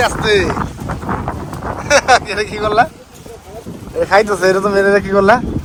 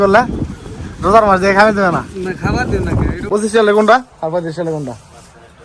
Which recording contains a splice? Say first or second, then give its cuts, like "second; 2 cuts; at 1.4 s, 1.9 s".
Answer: second; 1 cut; at 3.2 s